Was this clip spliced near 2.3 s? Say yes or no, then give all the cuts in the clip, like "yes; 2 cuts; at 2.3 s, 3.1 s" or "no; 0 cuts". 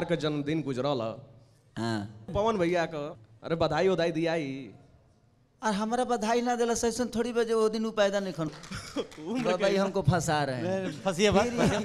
yes; 3 cuts; at 2.3 s, 3.1 s, 8.4 s